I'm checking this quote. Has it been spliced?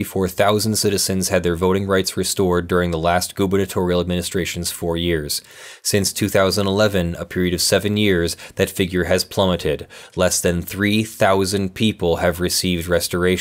no; 0 cuts

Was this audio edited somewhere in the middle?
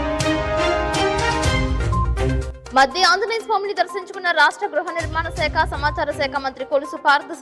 yes; 1 cut; at 2.5 s

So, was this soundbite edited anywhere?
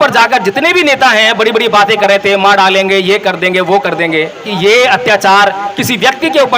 yes; 1 cut; at 4.5 s

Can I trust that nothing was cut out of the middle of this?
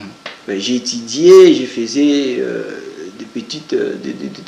yes; 0 cuts

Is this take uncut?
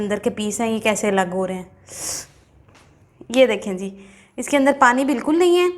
no; 1 cut; at 3.0 s

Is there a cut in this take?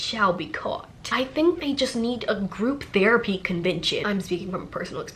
yes; 2 cuts; at 1.0 s, 4.0 s

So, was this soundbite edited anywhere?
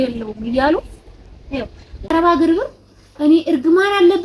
yes; 1 cut; at 2.1 s

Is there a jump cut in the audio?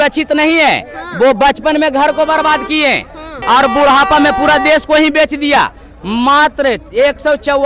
no; 0 cuts

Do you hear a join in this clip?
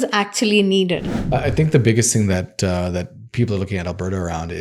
yes; 1 cut; at 1.1 s

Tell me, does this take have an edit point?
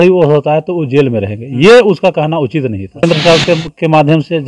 yes; 1 cut; at 3.0 s

